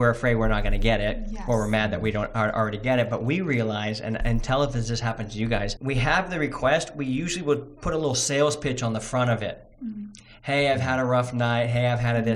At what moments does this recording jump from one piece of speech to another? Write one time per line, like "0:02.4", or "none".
0:05.7